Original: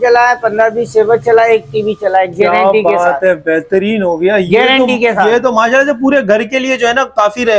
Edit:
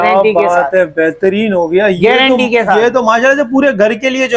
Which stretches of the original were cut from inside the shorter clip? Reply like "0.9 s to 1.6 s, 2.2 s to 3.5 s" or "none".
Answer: none